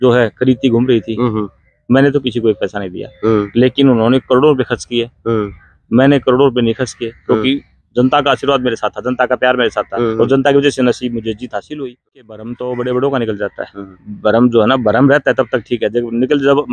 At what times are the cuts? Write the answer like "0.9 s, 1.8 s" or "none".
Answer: 11.9 s